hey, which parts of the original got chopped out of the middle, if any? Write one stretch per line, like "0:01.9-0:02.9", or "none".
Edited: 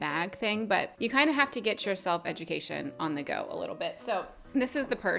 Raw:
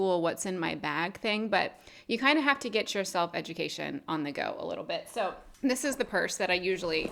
0:01.7-0:02.0